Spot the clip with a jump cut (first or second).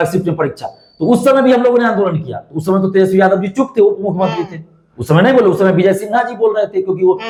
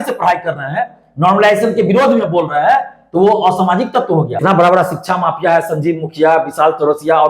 second